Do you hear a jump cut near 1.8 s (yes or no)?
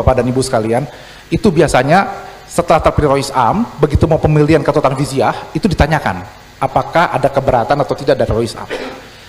no